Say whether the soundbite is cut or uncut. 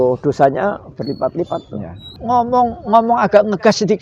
cut